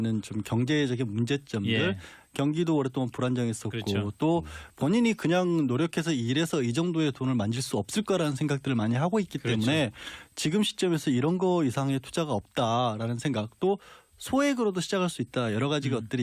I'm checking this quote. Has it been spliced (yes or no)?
yes